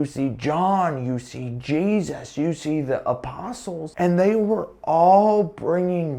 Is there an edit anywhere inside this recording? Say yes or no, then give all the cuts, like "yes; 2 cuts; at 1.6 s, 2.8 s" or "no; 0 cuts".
yes; 1 cut; at 3.8 s